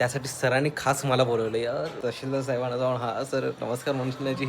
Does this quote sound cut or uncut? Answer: cut